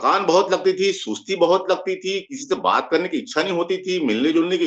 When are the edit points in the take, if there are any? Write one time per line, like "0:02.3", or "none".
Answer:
none